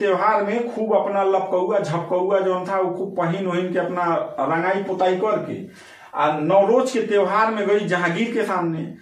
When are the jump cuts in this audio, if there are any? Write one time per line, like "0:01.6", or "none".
none